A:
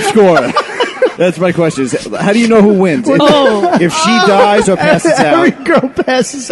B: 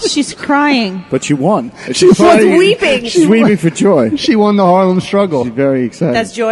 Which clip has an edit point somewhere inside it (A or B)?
A